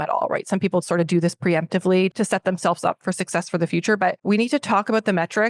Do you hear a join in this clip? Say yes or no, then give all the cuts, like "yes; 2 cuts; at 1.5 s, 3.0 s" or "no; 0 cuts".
yes; 2 cuts; at 2.1 s, 4.2 s